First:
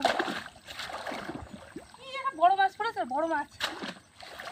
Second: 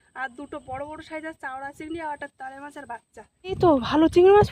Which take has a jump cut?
second; 1 cut; at 3.6 s

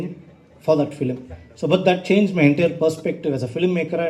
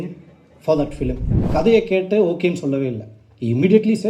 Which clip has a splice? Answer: second; 1 cut; at 1.3 s

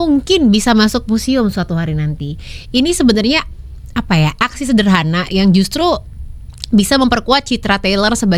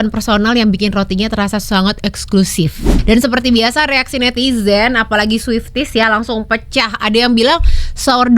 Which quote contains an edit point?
second; 1 cut; at 2.9 s

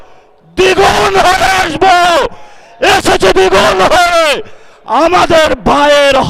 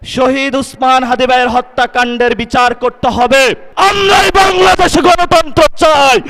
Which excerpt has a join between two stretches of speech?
second; 1 cut; at 3.6 s

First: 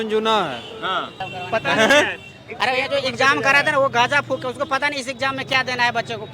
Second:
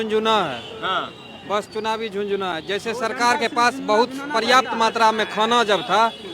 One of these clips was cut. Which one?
first; 1 cut; at 1.3 s

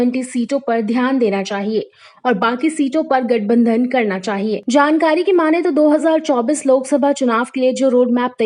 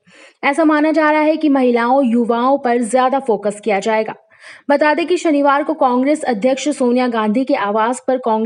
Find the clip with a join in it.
first; 1 cut; at 4.6 s

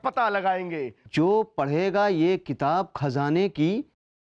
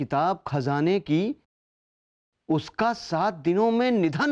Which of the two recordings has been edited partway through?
first; 1 cut; at 1.0 s

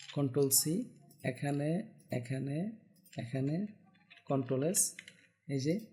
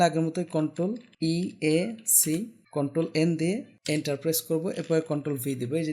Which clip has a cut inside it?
second; 3 cuts; at 1.1 s, 2.6 s, 3.7 s

